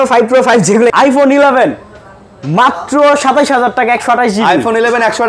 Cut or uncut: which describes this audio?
cut